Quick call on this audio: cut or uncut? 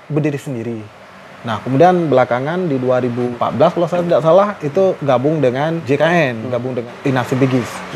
cut